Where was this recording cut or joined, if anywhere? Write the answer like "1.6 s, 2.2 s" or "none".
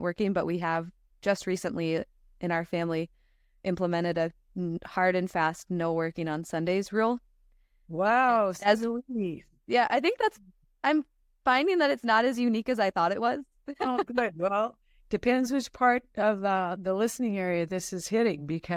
none